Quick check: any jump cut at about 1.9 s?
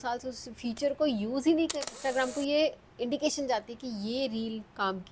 yes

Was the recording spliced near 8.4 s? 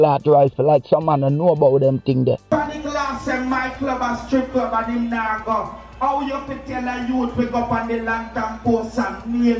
no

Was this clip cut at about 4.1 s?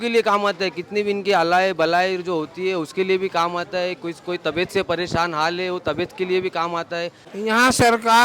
no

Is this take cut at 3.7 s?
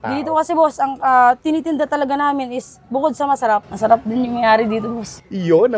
yes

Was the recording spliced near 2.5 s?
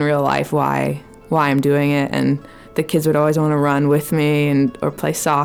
no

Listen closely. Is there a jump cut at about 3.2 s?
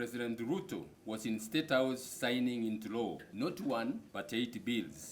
yes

